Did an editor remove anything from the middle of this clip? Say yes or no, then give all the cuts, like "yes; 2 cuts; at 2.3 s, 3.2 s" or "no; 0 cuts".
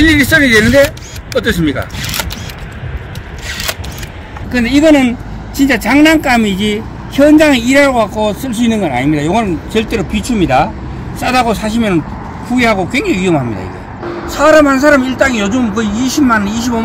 yes; 2 cuts; at 4.4 s, 14.0 s